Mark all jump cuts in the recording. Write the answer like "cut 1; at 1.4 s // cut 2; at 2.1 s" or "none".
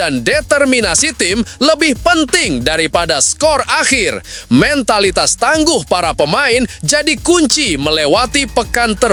none